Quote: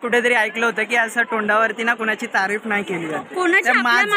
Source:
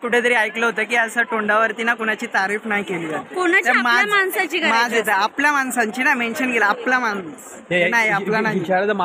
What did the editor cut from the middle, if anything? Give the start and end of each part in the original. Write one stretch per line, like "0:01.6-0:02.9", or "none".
none